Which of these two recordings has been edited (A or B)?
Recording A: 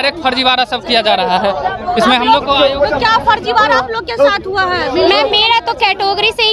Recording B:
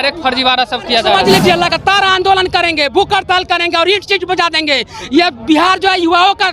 B